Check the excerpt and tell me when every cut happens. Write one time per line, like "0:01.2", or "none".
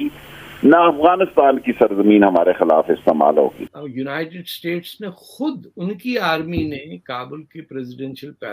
0:03.6